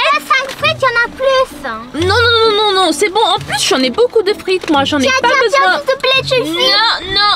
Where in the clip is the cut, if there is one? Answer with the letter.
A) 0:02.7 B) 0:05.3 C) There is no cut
C